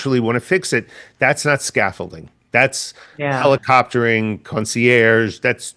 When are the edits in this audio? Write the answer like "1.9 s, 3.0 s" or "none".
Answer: none